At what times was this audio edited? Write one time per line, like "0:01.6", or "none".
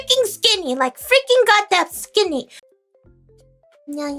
0:02.6